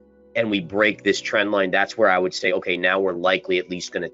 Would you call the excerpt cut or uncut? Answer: uncut